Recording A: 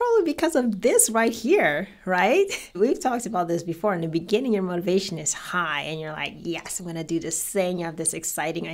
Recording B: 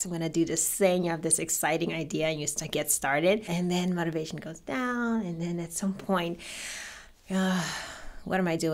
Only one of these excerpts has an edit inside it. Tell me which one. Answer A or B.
B